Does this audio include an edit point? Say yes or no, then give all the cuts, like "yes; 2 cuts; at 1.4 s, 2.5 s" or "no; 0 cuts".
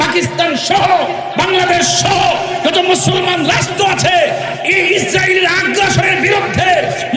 no; 0 cuts